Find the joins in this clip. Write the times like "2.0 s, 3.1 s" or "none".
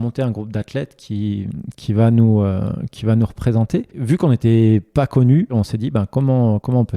4.0 s, 5.5 s

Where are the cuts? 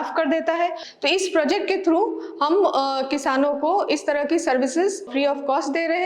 0.9 s, 5.1 s

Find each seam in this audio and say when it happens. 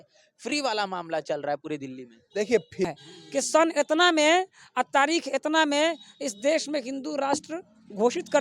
2.9 s

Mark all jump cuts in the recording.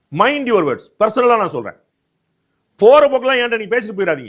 none

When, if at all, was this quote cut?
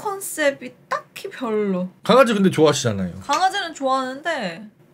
1.9 s

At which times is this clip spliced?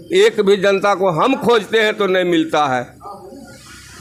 none

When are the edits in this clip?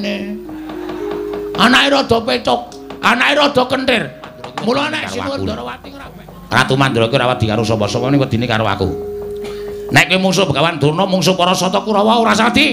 5.8 s

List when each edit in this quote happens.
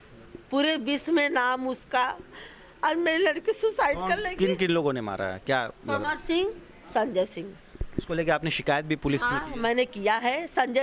none

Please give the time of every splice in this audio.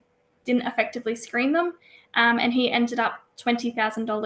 none

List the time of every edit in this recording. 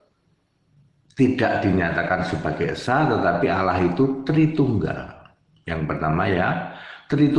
none

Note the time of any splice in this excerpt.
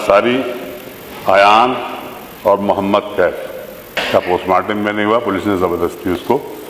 4.0 s

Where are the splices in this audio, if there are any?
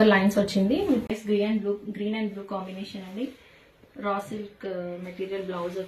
1.1 s

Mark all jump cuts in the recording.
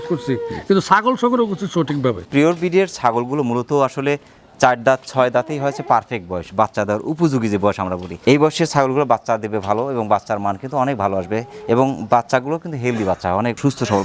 none

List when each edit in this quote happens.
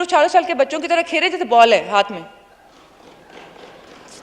none

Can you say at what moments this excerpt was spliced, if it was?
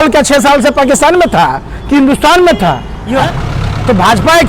3.2 s

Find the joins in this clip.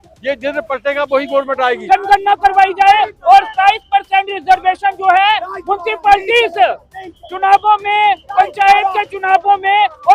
1.8 s

